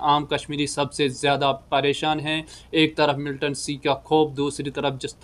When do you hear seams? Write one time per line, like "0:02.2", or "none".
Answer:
none